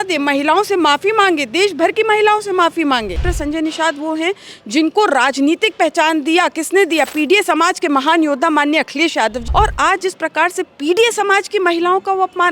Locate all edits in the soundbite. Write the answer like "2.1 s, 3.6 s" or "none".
3.3 s, 9.4 s

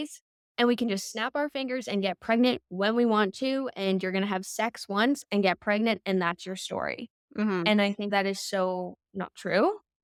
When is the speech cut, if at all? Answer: none

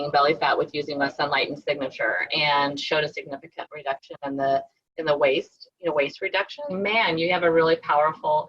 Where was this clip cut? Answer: 6.7 s

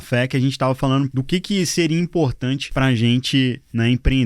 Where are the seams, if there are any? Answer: 1.1 s, 2.7 s

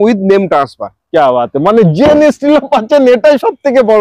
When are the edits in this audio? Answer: none

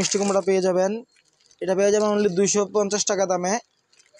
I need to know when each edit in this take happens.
none

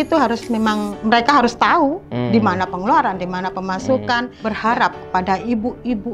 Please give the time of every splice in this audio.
0.9 s, 4.3 s

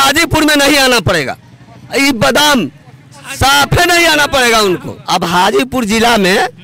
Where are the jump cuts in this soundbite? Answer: 4.9 s

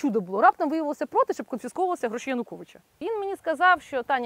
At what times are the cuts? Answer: 2.9 s

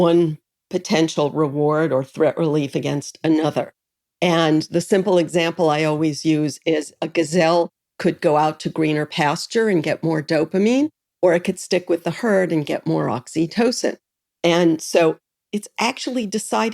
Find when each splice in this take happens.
none

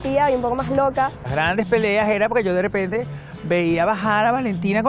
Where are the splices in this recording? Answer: 1.2 s

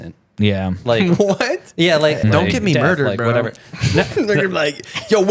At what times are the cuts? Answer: 2.2 s

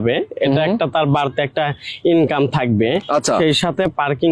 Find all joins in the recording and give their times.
none

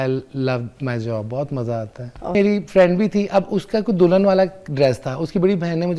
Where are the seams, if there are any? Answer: 2.3 s

